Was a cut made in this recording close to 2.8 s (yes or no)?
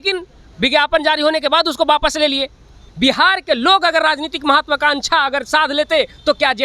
yes